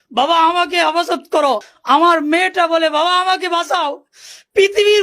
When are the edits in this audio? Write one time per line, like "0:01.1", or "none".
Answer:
0:01.7